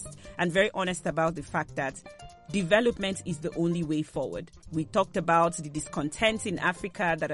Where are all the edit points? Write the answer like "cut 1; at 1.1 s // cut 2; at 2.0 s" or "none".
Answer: none